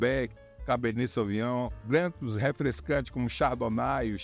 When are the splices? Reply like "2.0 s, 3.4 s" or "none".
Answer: 3.1 s

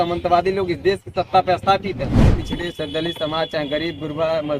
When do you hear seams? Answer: 2.2 s

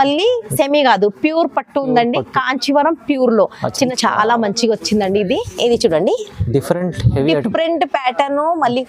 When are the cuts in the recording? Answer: 3.9 s

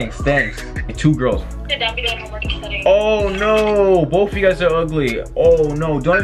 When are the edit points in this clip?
0.9 s

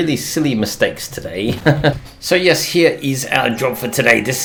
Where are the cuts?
none

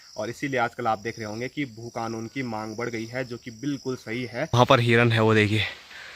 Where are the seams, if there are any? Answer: 4.5 s

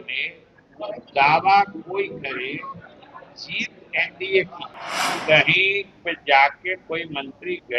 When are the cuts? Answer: 5.2 s

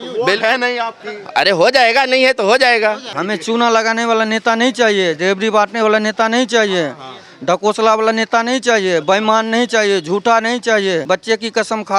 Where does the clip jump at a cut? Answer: 3.1 s, 11.0 s

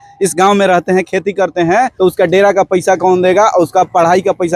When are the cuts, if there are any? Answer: 1.9 s

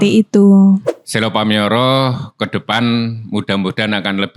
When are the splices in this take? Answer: 1.0 s

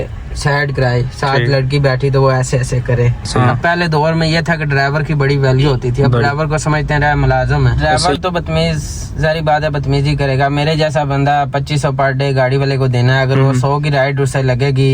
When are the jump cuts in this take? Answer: 3.5 s, 7.9 s

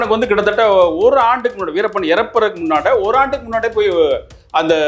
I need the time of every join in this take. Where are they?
none

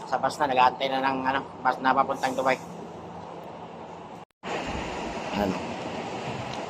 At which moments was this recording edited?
4.3 s

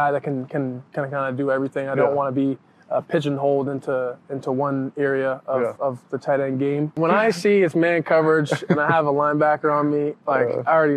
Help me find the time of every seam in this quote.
7.0 s

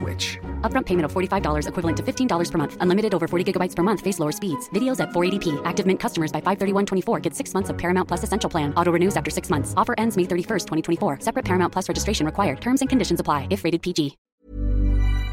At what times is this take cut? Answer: 14.2 s

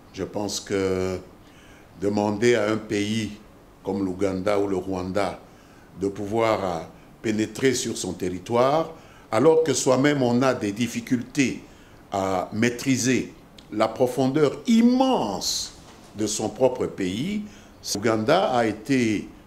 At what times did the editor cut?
17.9 s

